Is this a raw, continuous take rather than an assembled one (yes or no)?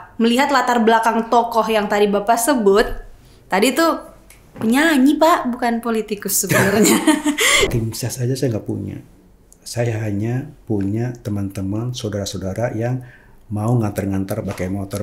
no